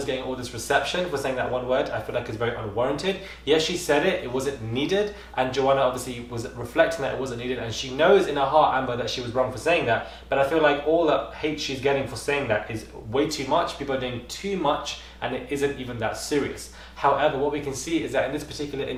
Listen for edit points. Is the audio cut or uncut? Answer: uncut